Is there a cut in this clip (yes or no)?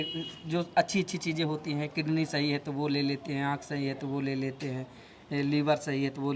no